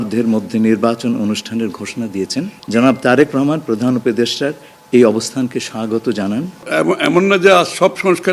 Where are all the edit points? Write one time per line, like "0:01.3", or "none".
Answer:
0:02.6
0:06.7

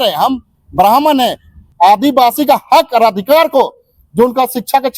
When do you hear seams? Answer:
0:01.6

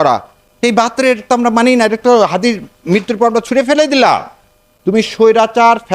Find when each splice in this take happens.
0:00.9
0:04.9

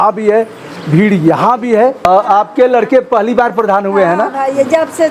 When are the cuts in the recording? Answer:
0:02.1

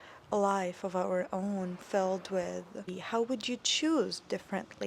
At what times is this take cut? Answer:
0:02.9

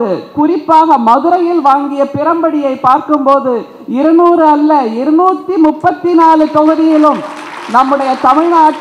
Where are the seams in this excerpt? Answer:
none

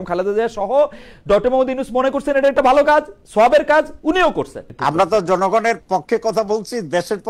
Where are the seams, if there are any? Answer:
0:04.7

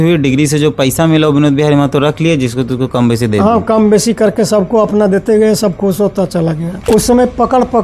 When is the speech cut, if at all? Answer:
0:06.7

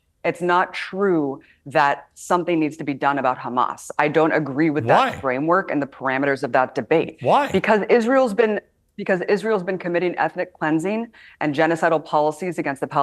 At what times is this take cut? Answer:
none

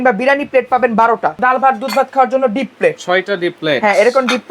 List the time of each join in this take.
0:01.4

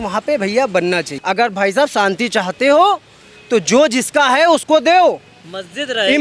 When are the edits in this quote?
0:01.1

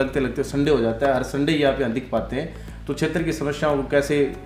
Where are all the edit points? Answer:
none

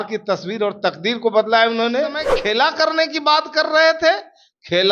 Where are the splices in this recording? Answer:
0:02.3

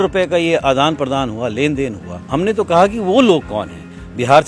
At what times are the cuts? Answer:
0:02.1

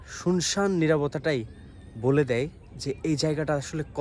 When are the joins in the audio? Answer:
none

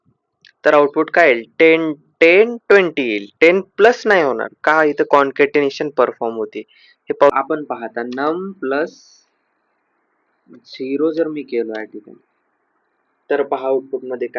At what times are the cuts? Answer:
0:07.3

